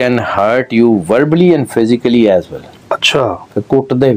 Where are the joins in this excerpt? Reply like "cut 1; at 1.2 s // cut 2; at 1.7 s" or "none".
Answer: none